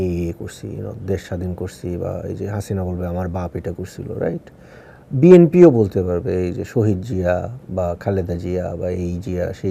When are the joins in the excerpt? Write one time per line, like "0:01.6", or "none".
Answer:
none